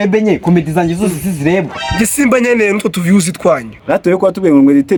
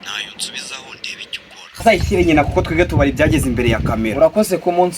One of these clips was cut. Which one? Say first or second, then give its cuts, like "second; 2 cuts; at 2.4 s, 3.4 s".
second; 1 cut; at 1.8 s